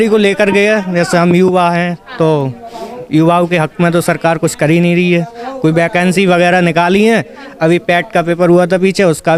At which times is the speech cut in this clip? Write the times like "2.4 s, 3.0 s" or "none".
none